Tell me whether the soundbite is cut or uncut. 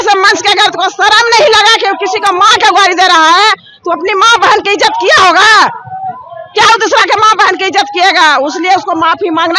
uncut